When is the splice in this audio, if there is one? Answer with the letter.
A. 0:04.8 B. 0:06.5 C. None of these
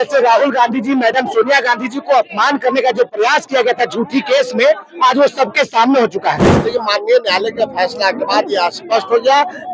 B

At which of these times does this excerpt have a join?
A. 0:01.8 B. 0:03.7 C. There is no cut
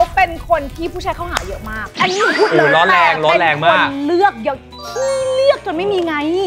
A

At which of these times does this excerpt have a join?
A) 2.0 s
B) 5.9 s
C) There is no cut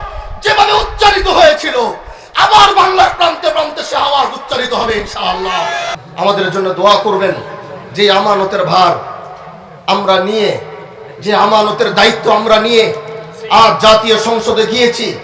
B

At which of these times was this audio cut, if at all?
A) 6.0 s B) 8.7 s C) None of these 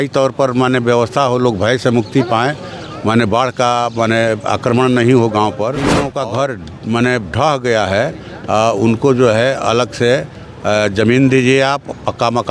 A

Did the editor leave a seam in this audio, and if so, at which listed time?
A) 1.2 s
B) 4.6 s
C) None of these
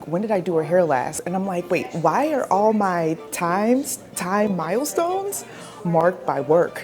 A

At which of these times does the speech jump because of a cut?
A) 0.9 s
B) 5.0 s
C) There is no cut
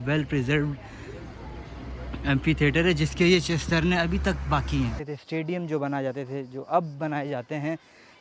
B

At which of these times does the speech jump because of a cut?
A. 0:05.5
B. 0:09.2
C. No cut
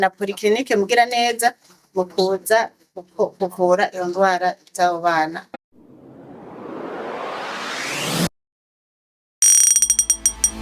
A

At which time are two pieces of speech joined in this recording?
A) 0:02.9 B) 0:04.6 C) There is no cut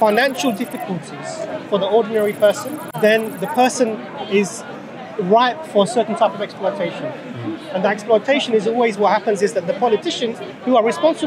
A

